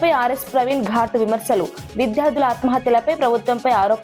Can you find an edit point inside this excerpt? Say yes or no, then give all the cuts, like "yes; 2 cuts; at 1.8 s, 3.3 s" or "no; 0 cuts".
no; 0 cuts